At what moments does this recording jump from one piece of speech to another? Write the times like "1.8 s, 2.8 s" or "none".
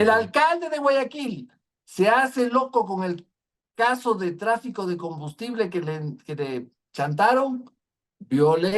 none